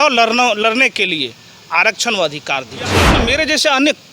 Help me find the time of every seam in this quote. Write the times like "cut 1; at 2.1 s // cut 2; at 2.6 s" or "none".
cut 1; at 3.2 s